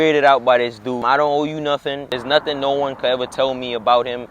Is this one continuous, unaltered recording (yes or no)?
no